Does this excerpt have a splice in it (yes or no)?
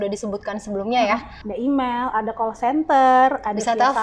yes